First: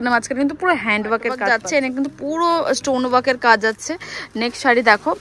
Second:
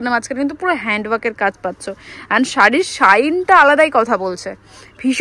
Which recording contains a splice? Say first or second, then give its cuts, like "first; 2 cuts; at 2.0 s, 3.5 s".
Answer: first; 1 cut; at 1.4 s